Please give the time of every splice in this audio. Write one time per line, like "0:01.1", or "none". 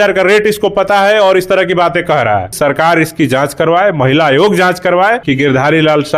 0:02.5
0:05.2